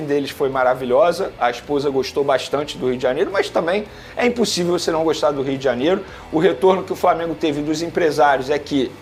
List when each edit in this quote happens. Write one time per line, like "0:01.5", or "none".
none